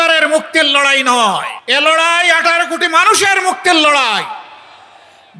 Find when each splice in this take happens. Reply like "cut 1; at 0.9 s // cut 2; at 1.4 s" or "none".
cut 1; at 1.6 s